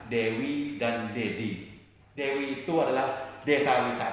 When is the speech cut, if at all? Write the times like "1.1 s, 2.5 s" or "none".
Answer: none